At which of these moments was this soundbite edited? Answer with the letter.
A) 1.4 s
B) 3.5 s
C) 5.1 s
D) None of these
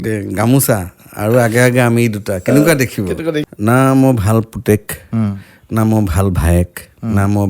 B